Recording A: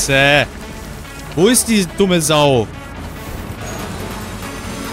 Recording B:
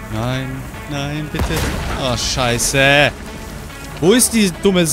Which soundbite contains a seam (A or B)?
A